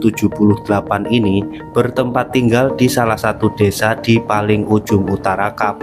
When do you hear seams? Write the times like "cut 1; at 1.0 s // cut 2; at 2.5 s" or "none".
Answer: none